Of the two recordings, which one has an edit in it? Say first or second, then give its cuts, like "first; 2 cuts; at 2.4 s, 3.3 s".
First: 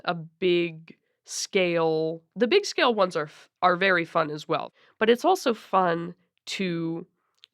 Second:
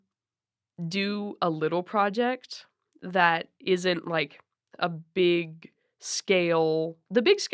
first; 1 cut; at 4.7 s